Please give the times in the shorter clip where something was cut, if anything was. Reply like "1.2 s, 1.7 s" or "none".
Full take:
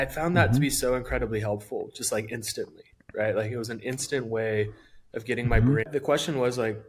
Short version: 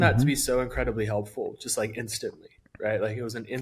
none